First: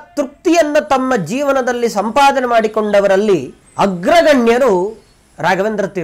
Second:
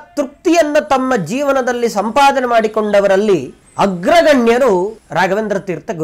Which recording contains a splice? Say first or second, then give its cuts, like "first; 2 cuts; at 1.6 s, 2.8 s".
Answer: second; 1 cut; at 5.0 s